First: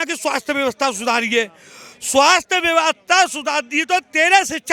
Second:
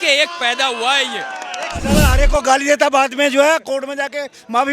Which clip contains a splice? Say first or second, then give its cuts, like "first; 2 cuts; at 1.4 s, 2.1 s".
second; 1 cut; at 1.8 s